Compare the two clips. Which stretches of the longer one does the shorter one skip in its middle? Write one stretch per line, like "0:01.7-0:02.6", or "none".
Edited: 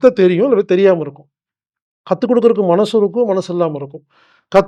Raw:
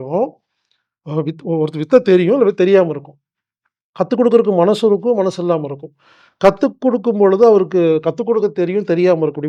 none